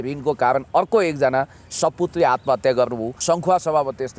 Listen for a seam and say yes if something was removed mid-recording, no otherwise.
yes